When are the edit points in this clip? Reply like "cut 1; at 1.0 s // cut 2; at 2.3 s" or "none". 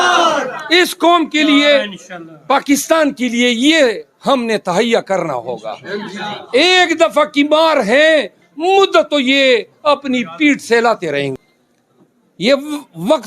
cut 1; at 11.3 s

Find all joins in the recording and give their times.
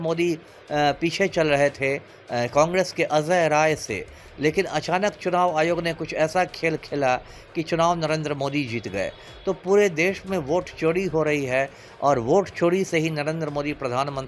none

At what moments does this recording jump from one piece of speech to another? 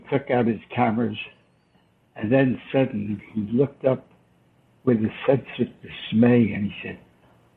none

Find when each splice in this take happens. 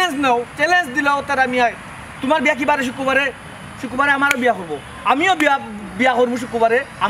none

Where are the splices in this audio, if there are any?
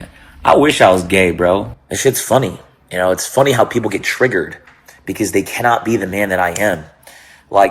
cut 1; at 1.8 s

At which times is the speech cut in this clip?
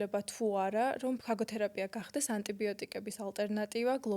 cut 1; at 1.2 s

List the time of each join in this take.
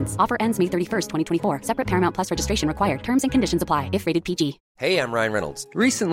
cut 1; at 4.7 s

